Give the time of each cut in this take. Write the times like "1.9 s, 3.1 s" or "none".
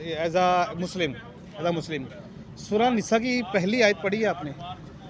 none